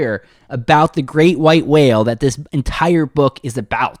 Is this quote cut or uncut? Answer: uncut